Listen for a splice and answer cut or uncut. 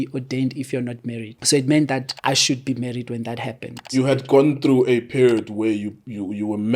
cut